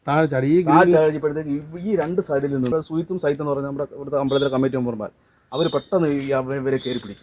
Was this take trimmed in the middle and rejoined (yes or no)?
yes